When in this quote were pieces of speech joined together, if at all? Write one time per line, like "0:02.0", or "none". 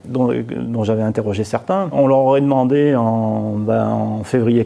0:01.9